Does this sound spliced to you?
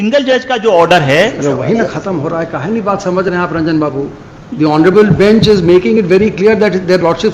no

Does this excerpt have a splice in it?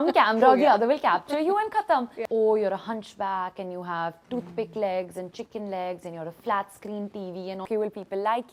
yes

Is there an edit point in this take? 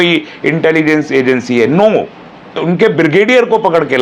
yes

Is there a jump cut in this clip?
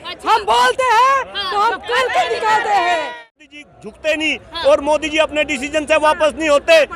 yes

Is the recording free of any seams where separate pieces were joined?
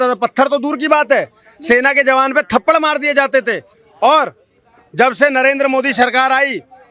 yes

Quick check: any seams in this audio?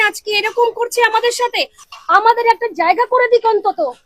yes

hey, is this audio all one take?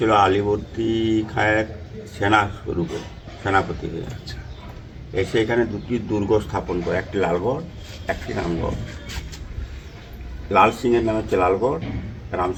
yes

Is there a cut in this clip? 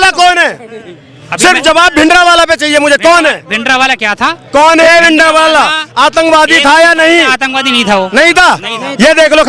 no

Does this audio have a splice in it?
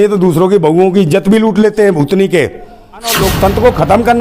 yes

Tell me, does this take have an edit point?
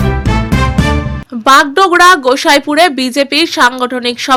no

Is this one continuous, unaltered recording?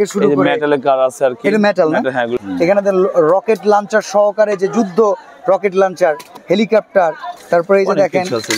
no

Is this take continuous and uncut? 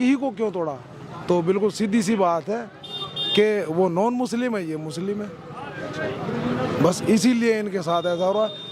yes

